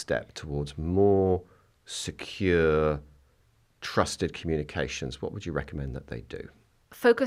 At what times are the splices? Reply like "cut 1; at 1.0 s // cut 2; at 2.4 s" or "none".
none